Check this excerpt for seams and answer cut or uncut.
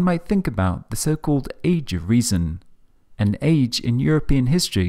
uncut